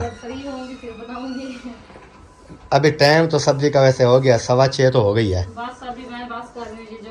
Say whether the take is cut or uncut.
uncut